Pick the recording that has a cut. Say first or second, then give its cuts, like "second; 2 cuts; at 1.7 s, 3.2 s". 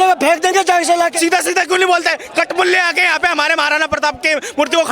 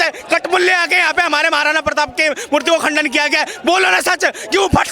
first; 1 cut; at 1.1 s